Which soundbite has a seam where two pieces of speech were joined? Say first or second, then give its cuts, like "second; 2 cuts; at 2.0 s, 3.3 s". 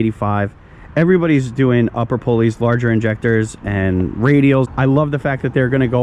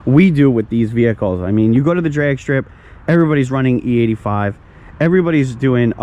first; 1 cut; at 4.7 s